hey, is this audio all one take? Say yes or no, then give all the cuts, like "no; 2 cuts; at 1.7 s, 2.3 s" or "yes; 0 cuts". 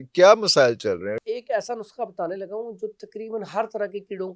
no; 1 cut; at 1.2 s